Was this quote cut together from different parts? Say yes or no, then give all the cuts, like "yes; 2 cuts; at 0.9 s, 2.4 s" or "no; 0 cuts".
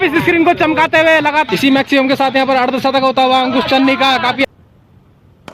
yes; 2 cuts; at 1.5 s, 4.4 s